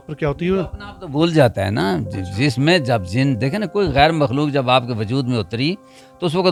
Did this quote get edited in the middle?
no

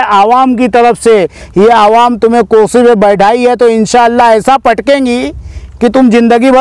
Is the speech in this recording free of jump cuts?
yes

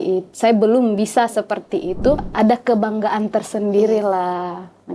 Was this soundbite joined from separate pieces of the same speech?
yes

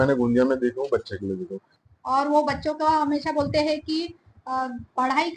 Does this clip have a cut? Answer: yes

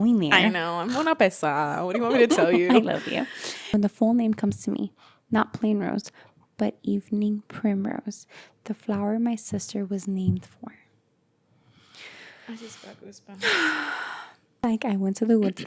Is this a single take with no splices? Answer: no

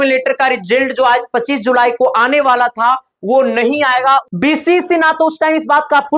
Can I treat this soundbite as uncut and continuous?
no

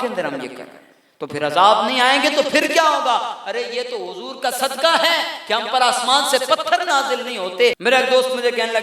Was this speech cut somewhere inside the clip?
yes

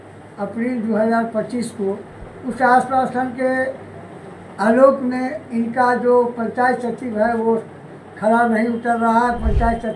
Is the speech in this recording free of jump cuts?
yes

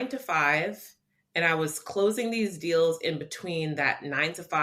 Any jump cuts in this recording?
no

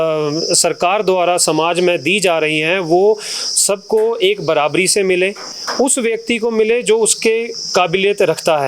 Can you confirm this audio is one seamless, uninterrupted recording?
yes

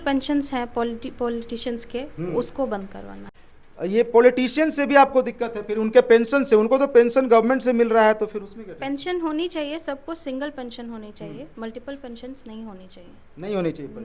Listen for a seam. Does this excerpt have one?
no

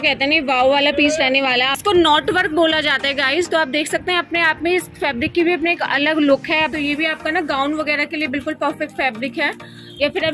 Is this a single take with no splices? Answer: no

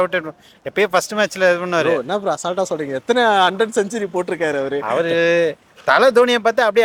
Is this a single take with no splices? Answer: yes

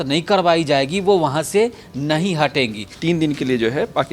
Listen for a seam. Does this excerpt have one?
yes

